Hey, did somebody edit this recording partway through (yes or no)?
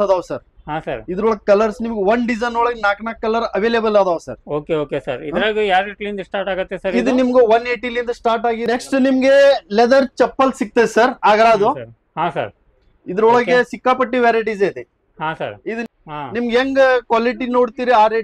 yes